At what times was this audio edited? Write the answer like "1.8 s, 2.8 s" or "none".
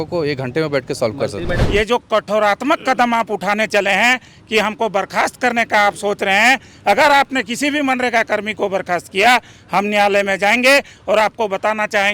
1.6 s